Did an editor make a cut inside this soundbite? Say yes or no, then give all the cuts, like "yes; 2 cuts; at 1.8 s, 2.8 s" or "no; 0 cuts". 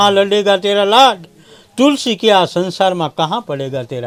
no; 0 cuts